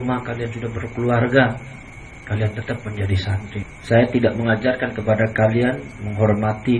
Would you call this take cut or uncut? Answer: cut